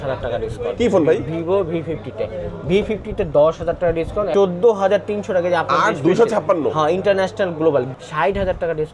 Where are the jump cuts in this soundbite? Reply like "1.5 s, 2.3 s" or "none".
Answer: 4.3 s, 7.9 s

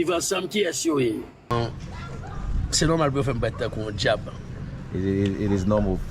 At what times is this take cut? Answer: 1.5 s

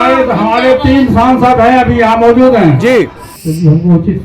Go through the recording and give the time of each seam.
3.3 s

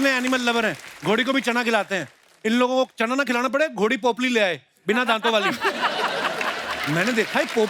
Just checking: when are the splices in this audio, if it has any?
none

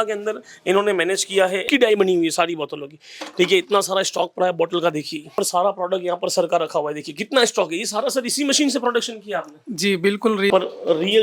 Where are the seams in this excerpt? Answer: 1.6 s, 5.3 s, 10.5 s

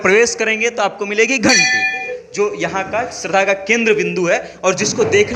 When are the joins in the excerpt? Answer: 2.1 s

